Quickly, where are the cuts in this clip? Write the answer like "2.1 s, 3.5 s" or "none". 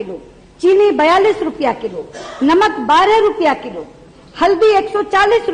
none